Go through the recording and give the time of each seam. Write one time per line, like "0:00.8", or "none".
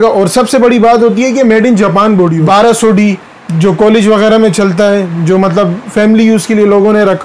0:02.4